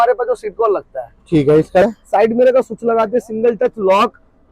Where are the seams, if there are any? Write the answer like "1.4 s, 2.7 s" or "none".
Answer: 1.8 s